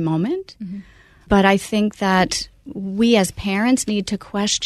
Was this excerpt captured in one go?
no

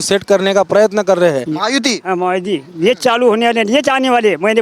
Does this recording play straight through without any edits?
no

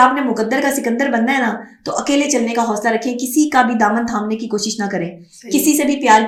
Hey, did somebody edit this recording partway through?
no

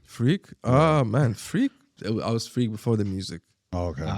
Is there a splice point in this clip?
yes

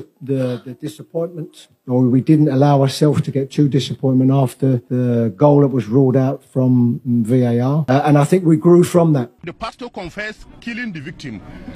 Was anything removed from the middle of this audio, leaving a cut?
yes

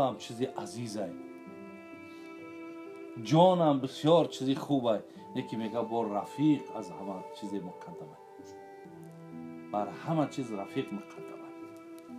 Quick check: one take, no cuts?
no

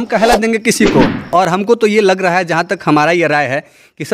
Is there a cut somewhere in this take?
yes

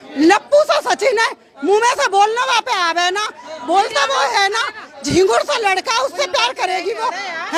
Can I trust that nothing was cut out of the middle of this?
yes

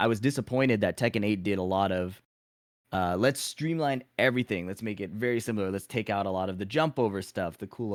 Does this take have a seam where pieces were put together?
no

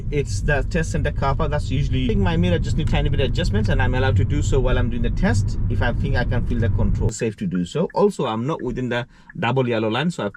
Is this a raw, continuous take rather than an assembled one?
no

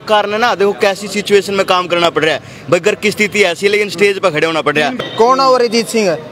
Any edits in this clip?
yes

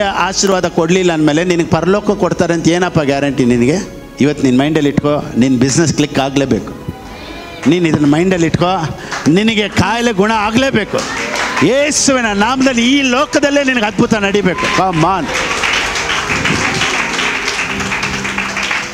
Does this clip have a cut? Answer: yes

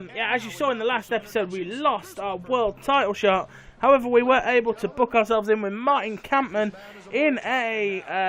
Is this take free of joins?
yes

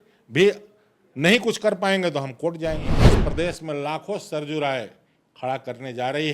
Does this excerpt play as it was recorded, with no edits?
no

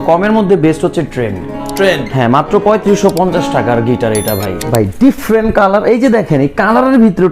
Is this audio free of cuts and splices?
no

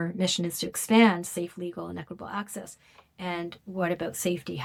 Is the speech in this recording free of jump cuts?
yes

